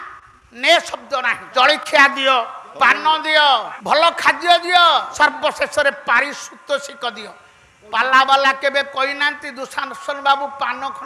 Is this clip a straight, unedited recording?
no; 4 cuts; at 1.4 s, 2.6 s, 3.7 s, 5.1 s

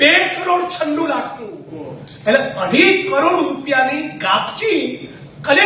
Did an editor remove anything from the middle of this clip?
no; 0 cuts

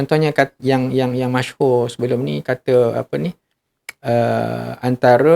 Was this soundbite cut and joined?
no; 0 cuts

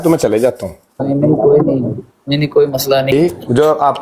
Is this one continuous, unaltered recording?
no; 1 cut; at 3.1 s

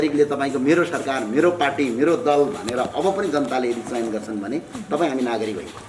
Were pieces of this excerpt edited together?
no; 0 cuts

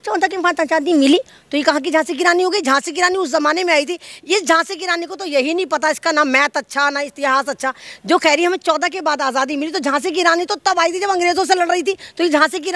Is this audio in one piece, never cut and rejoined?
yes; 0 cuts

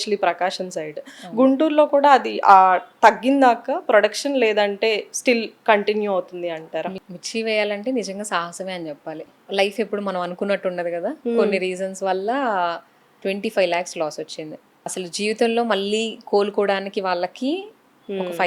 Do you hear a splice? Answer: yes; 4 cuts; at 7.0 s, 9.3 s, 13.1 s, 14.9 s

